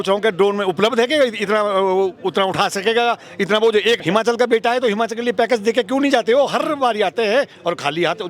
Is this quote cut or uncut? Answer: cut